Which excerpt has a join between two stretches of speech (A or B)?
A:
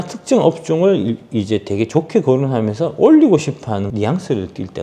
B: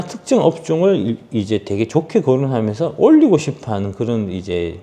A